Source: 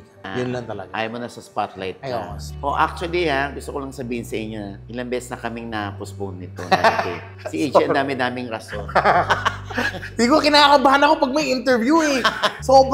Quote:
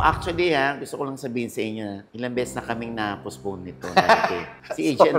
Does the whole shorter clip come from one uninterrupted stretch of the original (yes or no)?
yes